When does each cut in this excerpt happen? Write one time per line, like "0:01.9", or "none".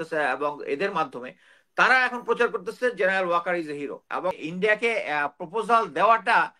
0:04.4